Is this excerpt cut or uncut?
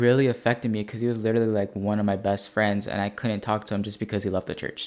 uncut